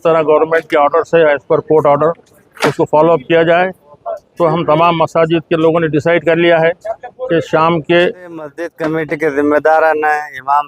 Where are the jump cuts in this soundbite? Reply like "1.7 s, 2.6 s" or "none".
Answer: 8.7 s